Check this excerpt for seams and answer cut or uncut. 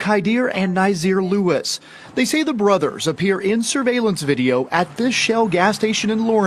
uncut